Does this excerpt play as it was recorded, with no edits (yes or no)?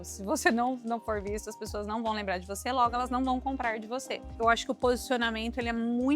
no